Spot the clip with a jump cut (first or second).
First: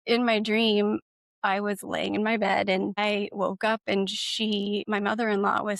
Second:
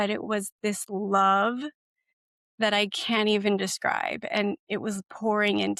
first